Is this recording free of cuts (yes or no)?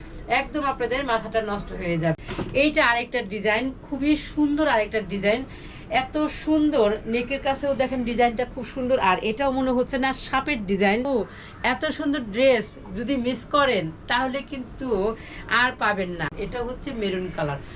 no